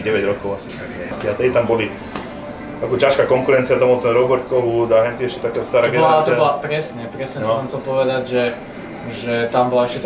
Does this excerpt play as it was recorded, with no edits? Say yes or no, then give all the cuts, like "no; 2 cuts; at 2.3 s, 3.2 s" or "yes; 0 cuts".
no; 1 cut; at 1.1 s